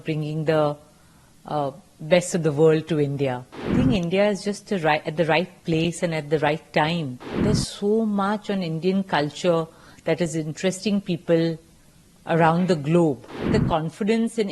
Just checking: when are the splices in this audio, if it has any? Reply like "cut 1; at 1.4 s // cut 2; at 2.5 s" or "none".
cut 1; at 3.7 s // cut 2; at 7.3 s // cut 3; at 13.5 s